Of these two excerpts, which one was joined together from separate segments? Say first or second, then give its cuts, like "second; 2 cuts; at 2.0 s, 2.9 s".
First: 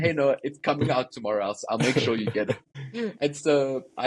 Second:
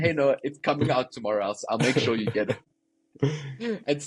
first; 1 cut; at 2.8 s